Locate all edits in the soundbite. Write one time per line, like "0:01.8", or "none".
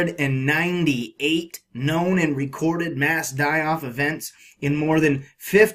0:01.9